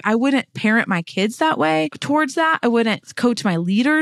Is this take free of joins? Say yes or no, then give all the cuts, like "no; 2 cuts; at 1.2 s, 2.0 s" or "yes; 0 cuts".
no; 2 cuts; at 2.0 s, 3.1 s